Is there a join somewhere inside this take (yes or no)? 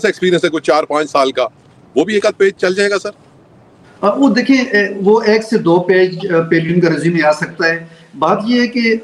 no